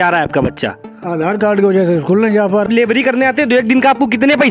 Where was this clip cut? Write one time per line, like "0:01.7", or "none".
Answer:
0:02.7